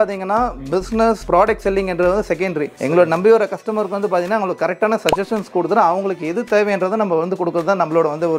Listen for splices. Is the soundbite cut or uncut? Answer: uncut